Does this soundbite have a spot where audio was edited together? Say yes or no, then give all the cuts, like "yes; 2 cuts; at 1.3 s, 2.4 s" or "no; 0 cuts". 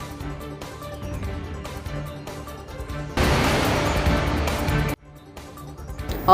yes; 3 cuts; at 1.5 s, 2.9 s, 5.1 s